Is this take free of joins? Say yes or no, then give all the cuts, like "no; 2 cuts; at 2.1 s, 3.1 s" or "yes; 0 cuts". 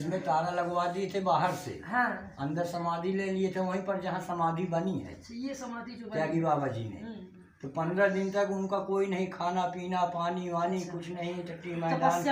yes; 0 cuts